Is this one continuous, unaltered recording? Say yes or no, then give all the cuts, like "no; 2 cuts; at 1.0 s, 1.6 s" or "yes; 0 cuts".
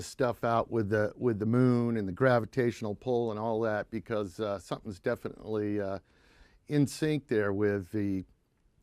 no; 1 cut; at 7.8 s